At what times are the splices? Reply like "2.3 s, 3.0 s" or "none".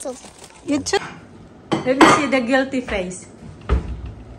1.0 s